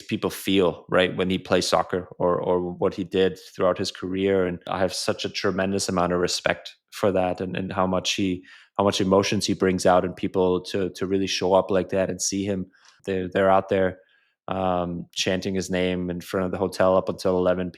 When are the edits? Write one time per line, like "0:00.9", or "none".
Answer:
0:04.6
0:12.9